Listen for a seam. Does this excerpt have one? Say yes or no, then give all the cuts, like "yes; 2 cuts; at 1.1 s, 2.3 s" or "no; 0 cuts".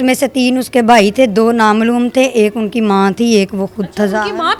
no; 0 cuts